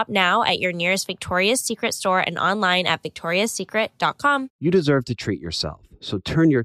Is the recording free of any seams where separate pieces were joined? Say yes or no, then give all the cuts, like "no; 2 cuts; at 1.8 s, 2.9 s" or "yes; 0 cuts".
no; 1 cut; at 4.5 s